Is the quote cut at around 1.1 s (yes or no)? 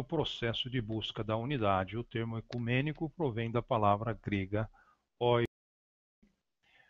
yes